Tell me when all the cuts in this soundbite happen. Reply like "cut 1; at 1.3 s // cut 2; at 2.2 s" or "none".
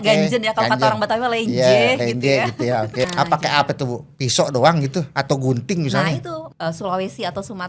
cut 1; at 3.1 s // cut 2; at 6.3 s